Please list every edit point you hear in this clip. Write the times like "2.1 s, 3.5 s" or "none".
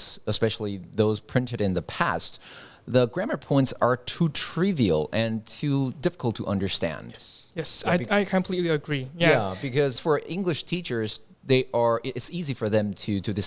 10.0 s